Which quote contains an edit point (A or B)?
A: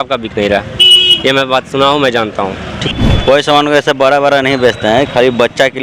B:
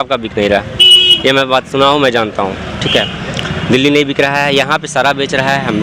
A